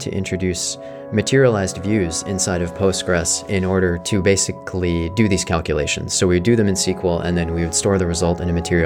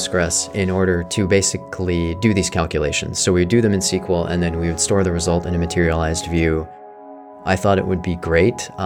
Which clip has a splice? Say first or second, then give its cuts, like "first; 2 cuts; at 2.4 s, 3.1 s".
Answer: second; 1 cut; at 7.2 s